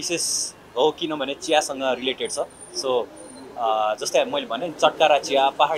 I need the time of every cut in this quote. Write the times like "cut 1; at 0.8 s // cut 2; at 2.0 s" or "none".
none